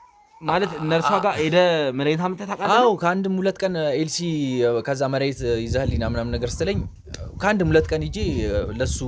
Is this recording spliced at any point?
no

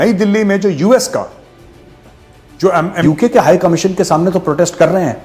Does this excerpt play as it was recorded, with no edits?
no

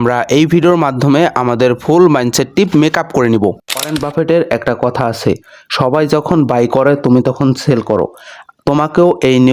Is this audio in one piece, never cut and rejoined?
no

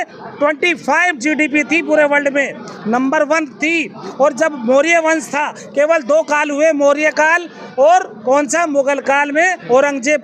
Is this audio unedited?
yes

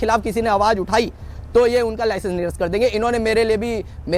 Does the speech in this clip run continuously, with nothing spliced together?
yes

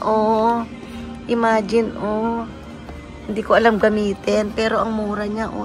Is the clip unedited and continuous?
yes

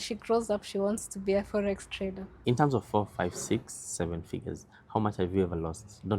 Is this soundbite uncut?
no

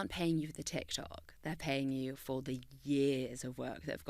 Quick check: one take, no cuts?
yes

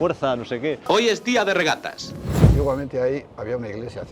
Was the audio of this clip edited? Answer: yes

